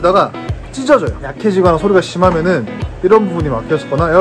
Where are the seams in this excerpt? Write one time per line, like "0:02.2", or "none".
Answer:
0:01.2